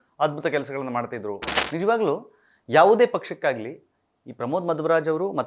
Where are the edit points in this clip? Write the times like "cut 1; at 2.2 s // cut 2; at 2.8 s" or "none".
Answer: cut 1; at 1.5 s